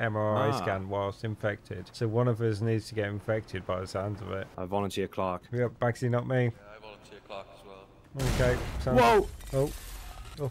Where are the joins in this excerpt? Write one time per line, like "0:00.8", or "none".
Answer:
none